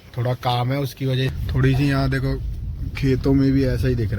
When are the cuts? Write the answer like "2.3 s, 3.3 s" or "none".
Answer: 1.3 s

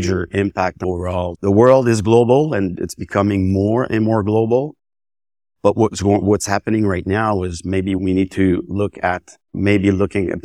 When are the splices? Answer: none

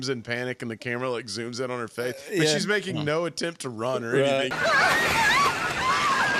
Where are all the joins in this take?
none

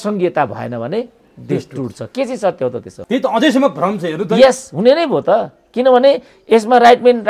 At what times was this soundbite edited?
none

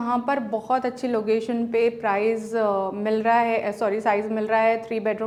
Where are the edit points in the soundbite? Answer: none

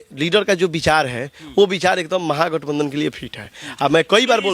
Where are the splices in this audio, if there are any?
none

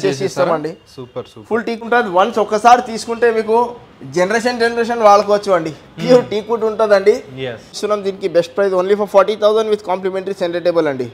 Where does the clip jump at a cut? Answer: 1.8 s, 7.7 s

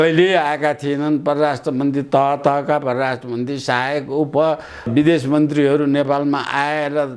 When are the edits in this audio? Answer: 4.9 s

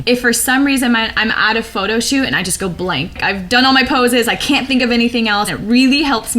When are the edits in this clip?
3.2 s, 5.6 s

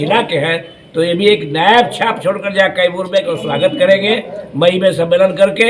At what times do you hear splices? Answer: 3.3 s

